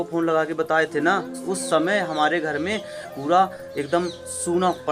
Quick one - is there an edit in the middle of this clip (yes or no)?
yes